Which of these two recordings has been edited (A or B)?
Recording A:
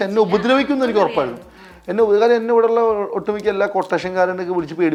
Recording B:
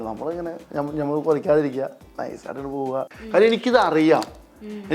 B